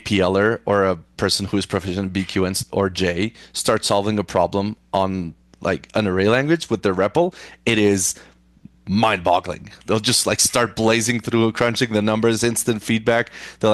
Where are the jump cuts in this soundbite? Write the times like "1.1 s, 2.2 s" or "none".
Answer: none